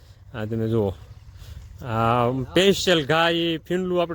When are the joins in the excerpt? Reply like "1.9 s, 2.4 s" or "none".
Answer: none